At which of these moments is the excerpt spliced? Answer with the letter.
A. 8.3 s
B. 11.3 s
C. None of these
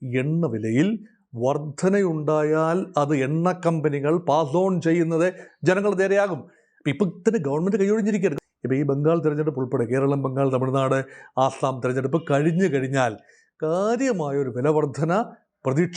A